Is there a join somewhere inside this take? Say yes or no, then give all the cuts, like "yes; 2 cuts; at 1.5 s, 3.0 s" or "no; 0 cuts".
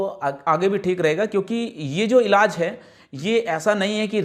no; 0 cuts